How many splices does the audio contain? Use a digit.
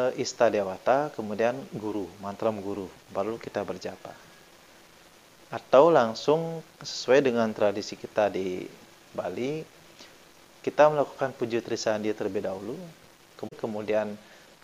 1